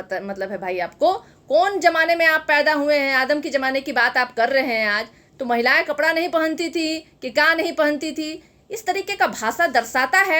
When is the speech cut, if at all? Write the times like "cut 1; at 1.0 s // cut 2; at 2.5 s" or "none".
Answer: none